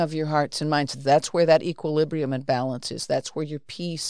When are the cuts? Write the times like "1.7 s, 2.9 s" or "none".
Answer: 0.9 s